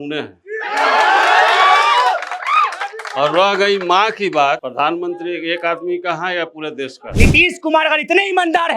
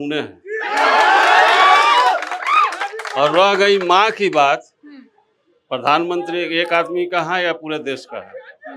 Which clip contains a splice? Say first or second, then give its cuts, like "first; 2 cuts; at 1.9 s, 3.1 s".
first; 2 cuts; at 4.7 s, 7.0 s